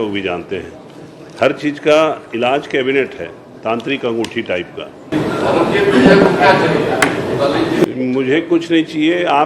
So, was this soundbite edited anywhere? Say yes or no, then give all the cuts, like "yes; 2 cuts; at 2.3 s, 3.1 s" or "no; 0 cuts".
yes; 1 cut; at 5.1 s